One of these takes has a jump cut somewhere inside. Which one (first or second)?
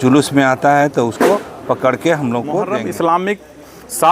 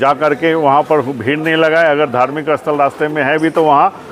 first